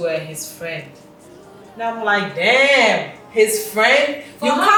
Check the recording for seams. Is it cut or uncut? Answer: uncut